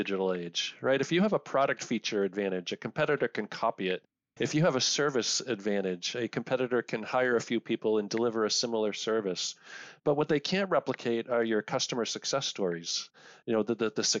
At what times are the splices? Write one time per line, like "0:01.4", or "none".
none